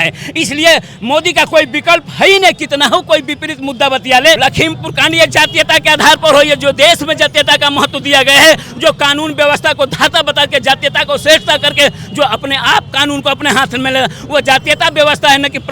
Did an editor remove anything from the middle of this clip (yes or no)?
yes